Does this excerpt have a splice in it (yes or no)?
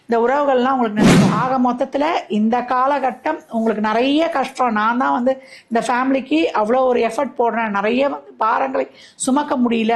yes